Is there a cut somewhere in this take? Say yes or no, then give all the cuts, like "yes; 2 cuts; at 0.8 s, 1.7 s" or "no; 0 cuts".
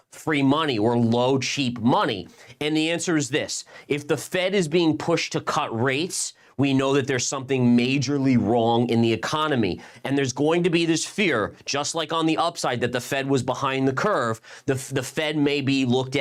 no; 0 cuts